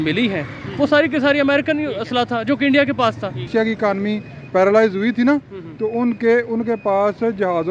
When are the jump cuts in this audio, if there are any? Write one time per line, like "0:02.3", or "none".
0:03.5